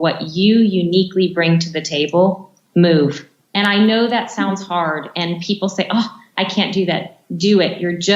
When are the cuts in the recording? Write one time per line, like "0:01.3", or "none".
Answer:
none